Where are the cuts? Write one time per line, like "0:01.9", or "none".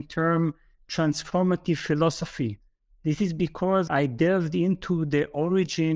0:03.9